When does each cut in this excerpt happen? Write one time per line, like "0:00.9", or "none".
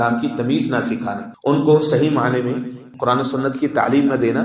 0:01.3
0:02.9